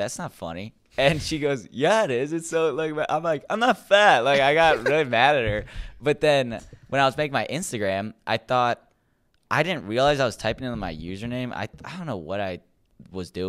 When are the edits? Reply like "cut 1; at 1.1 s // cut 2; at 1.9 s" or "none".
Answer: none